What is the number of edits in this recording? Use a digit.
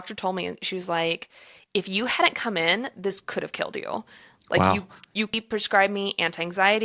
1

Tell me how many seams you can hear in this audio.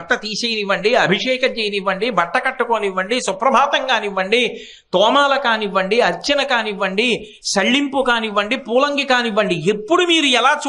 0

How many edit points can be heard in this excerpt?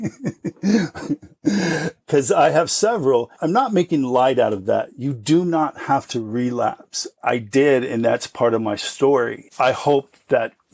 4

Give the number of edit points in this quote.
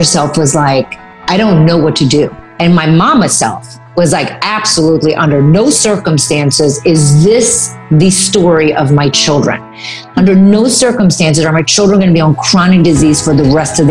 1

